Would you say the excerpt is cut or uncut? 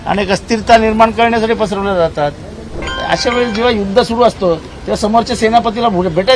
cut